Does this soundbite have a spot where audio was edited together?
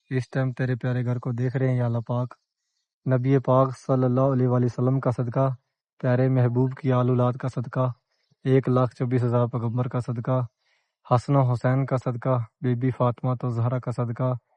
no; 0 cuts

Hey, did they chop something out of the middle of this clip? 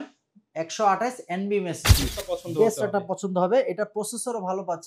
yes; 1 cut; at 2.1 s

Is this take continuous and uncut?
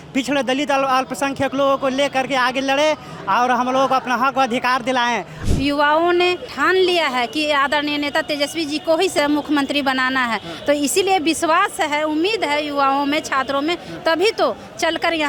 no; 3 cuts; at 5.4 s, 6.5 s, 9.1 s

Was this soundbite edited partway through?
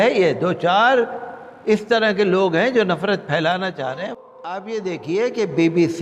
yes; 1 cut; at 4.1 s

